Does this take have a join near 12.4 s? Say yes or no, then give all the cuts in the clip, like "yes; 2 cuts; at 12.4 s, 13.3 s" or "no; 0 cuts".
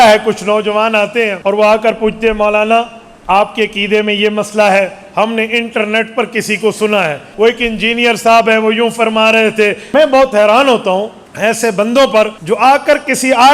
yes; 5 cuts; at 1.4 s, 7.3 s, 9.8 s, 11.2 s, 12.4 s